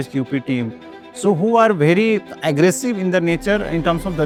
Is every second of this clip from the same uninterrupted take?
yes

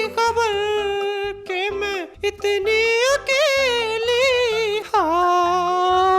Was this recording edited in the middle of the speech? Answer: yes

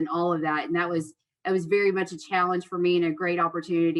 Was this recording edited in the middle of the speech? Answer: no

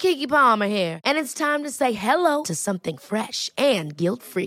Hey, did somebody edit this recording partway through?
no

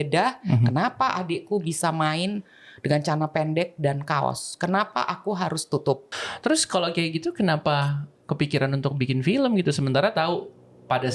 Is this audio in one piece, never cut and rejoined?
no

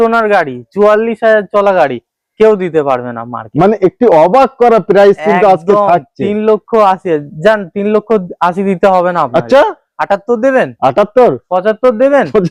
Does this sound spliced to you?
no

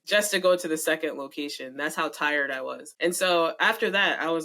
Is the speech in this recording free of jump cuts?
no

